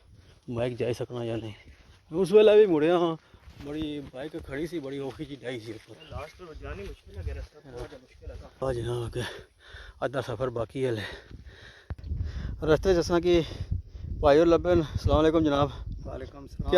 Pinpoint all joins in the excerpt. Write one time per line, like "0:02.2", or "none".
0:08.6